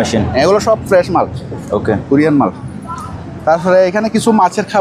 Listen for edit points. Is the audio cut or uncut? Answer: uncut